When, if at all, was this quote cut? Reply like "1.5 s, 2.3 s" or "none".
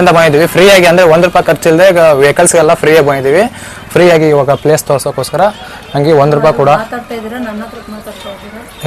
none